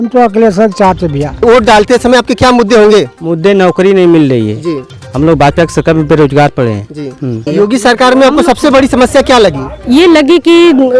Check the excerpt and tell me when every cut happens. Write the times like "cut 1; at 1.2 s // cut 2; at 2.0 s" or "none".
cut 1; at 1.3 s // cut 2; at 7.3 s

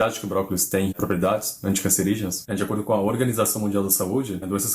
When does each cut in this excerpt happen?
cut 1; at 0.9 s // cut 2; at 2.4 s

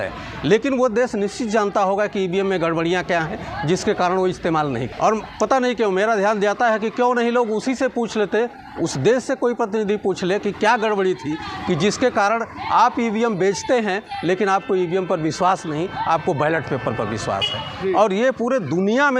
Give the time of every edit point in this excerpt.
cut 1; at 4.9 s

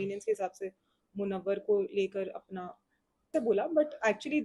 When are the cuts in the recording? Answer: cut 1; at 3.3 s

